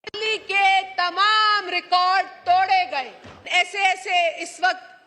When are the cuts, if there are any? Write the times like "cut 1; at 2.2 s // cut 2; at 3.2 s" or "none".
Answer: cut 1; at 3.4 s